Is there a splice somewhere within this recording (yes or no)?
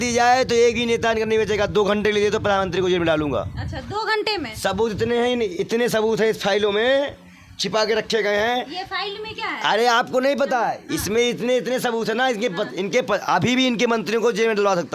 no